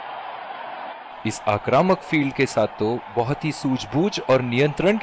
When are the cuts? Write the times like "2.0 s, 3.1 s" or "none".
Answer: 1.2 s